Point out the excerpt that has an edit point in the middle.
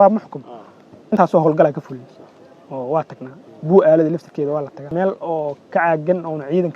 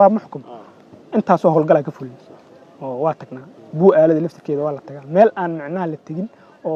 first; 2 cuts; at 1.1 s, 4.9 s

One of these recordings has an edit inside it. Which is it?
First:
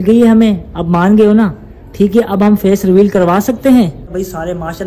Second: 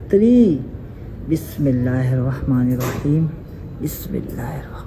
first; 1 cut; at 3.9 s

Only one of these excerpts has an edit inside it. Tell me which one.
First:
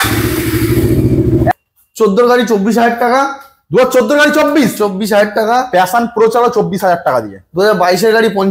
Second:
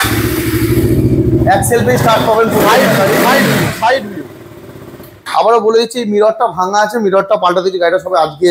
first; 1 cut; at 1.5 s

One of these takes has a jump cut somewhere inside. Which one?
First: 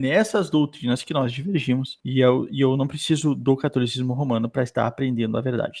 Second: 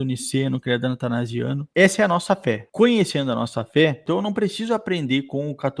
second; 3 cuts; at 1.7 s, 2.7 s, 4.0 s

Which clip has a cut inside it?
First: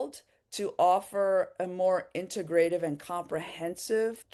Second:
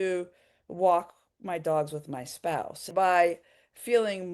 second; 1 cut; at 2.9 s

